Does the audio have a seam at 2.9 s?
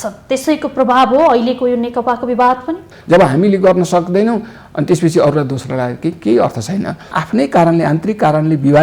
yes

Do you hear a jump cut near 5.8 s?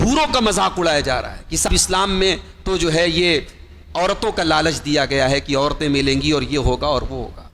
no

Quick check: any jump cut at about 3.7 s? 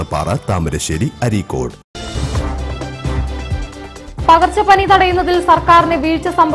yes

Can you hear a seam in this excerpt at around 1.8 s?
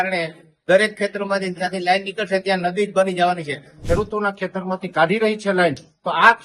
no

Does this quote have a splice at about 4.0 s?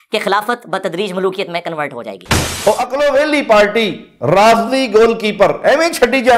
no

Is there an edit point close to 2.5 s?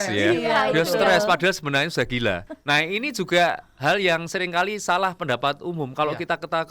yes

